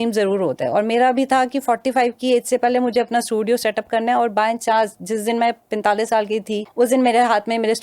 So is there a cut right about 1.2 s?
no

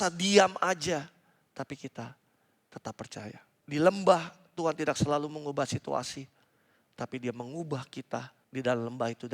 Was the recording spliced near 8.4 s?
yes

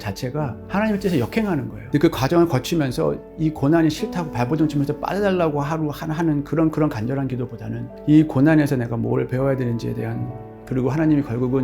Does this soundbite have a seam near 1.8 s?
yes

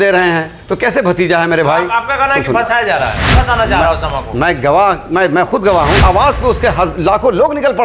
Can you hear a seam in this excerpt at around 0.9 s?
no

